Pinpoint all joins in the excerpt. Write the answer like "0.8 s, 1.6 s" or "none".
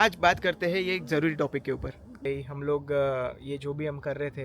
2.3 s